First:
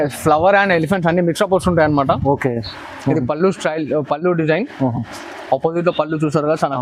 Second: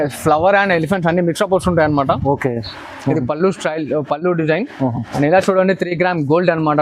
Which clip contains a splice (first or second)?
second